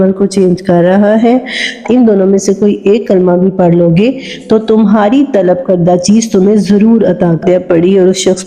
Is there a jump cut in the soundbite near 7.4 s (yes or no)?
yes